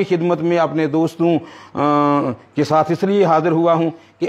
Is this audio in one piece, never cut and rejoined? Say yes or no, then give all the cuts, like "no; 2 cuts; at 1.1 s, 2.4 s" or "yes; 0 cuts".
yes; 0 cuts